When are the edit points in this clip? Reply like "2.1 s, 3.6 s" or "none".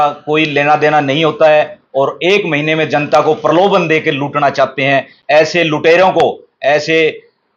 none